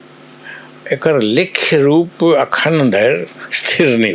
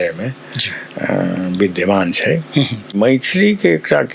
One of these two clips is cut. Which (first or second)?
second